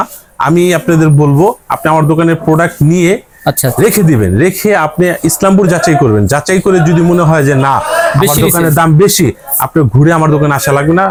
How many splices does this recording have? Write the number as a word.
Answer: zero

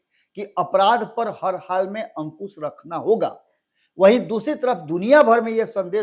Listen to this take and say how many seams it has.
zero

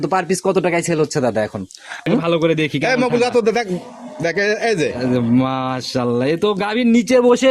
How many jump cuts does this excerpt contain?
one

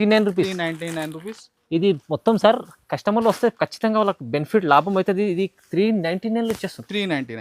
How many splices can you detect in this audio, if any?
zero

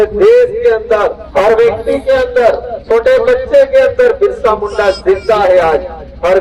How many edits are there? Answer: two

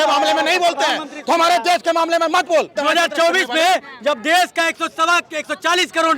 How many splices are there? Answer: one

